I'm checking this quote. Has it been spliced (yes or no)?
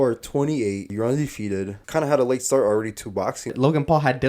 yes